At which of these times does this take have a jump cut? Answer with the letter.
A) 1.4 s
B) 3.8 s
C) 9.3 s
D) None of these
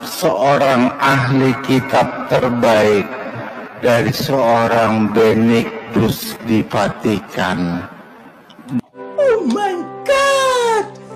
C